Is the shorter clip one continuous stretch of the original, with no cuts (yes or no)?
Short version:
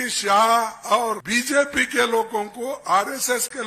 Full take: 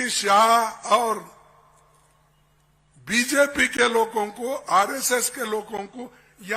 no